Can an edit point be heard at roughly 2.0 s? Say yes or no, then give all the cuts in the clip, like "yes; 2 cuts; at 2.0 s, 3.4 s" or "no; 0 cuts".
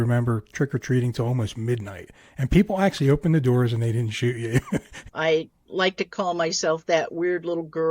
no; 1 cut; at 5.0 s